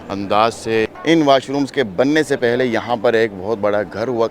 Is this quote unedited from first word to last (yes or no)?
no